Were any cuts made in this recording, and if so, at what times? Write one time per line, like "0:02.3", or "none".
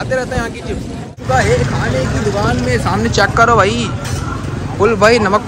0:01.1